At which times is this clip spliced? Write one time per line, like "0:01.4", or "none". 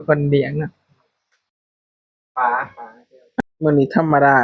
0:03.4